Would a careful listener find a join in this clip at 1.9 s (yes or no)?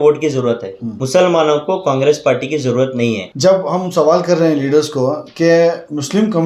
no